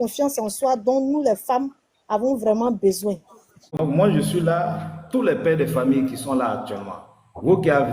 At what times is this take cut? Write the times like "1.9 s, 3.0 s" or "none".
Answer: 3.3 s